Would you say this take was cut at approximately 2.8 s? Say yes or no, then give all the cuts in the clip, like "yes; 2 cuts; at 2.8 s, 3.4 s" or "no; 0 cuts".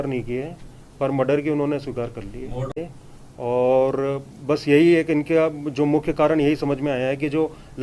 yes; 1 cut; at 2.8 s